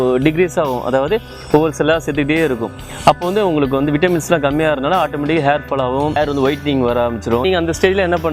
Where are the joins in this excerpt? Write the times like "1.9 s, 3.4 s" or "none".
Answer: 6.2 s, 7.4 s